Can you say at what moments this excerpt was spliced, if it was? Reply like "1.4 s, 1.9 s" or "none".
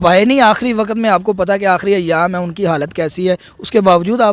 none